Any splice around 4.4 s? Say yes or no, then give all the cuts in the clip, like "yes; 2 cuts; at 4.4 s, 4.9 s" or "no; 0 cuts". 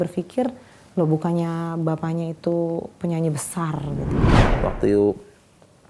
yes; 1 cut; at 4.4 s